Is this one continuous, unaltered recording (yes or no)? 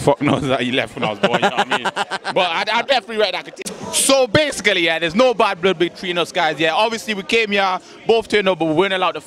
yes